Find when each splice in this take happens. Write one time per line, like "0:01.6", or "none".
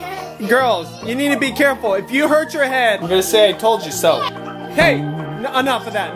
none